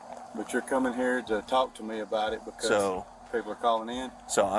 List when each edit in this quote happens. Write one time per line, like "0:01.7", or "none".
none